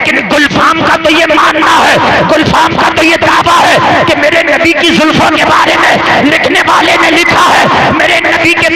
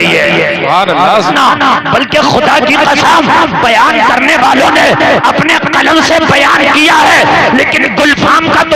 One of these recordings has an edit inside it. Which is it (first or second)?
second